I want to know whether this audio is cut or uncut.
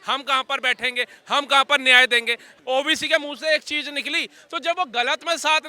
cut